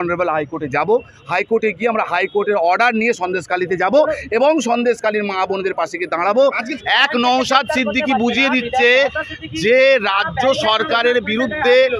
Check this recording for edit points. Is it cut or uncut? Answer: cut